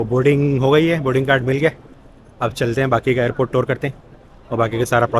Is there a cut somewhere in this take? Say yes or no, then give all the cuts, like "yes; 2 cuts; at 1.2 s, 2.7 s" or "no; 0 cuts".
no; 0 cuts